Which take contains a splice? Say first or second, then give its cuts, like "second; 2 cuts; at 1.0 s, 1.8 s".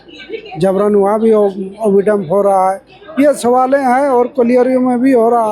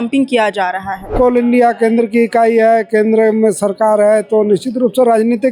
second; 1 cut; at 1.1 s